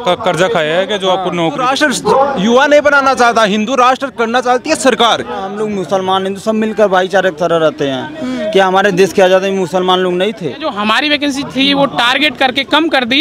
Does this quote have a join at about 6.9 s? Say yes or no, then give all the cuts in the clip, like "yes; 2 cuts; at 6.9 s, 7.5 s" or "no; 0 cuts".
no; 3 cuts; at 1.7 s, 5.5 s, 10.7 s